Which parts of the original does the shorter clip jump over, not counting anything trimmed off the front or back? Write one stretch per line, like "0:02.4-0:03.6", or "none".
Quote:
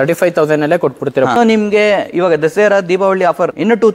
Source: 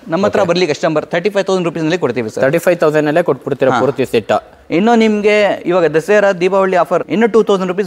0:03.8-0:04.9